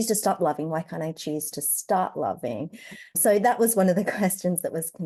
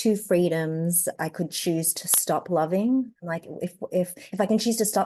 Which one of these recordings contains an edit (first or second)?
second